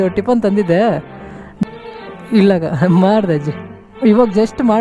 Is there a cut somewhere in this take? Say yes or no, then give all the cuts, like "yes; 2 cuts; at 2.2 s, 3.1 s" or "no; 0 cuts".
yes; 1 cut; at 1.6 s